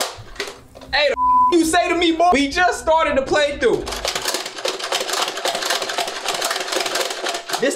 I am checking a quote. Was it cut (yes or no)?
yes